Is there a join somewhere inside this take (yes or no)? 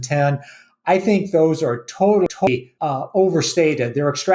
yes